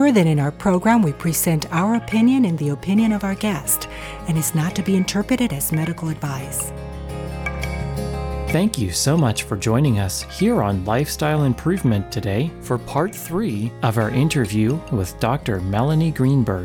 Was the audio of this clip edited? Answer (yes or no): yes